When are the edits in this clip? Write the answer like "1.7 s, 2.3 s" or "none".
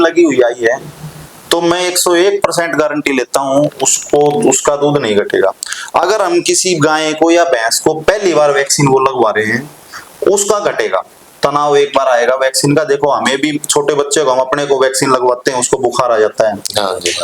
none